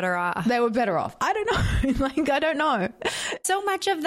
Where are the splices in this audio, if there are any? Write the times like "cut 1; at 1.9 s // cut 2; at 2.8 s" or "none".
none